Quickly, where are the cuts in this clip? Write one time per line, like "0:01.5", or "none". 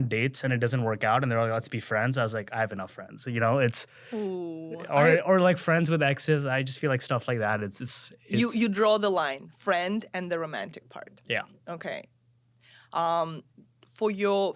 none